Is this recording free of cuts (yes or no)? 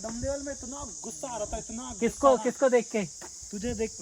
yes